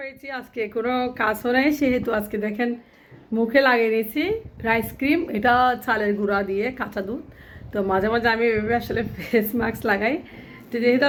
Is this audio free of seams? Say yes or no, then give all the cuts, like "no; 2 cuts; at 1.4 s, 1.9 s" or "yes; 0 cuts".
yes; 0 cuts